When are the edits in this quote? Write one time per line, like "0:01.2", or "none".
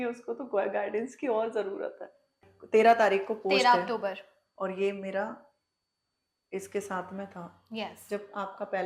0:02.5